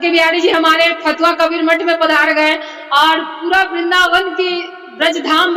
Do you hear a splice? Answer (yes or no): no